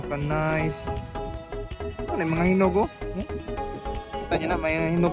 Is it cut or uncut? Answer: uncut